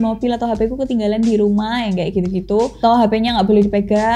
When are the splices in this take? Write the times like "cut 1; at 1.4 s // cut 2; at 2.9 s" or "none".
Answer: cut 1; at 2.8 s